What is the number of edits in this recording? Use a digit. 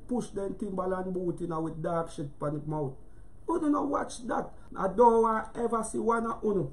1